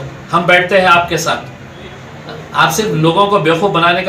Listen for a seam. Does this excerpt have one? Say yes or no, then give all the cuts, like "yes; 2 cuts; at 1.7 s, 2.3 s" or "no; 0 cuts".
no; 0 cuts